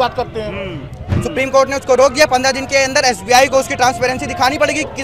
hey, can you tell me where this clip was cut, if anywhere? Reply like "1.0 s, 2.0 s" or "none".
1.1 s